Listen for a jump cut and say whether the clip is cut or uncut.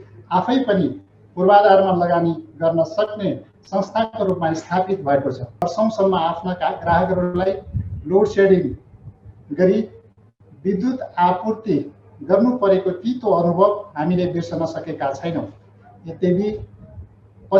cut